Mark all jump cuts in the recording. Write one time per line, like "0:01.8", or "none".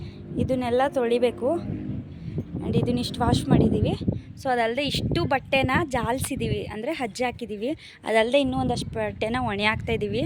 none